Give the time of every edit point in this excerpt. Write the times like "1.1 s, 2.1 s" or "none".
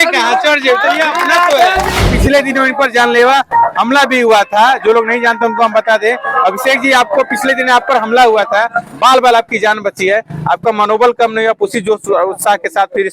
2.1 s